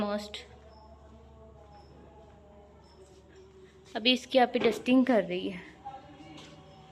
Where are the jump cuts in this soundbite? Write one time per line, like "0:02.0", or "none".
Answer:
none